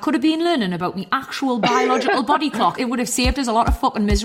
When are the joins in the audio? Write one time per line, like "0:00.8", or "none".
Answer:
0:02.8